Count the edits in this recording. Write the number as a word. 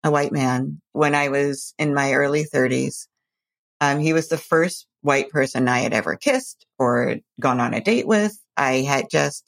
one